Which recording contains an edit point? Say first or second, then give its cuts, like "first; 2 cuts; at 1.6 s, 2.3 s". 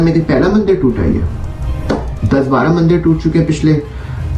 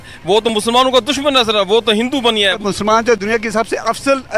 second; 1 cut; at 2.6 s